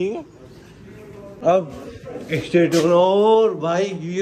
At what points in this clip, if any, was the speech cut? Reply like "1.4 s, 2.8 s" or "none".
1.3 s